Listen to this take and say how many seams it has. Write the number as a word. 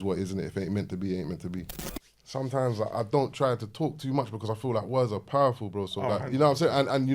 one